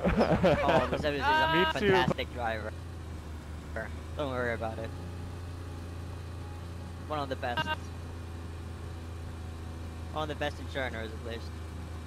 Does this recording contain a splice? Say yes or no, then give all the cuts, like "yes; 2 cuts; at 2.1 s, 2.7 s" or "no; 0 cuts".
no; 0 cuts